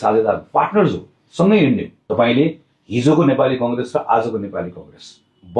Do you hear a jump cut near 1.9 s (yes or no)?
yes